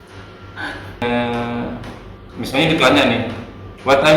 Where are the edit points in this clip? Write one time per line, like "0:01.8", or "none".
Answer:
0:01.0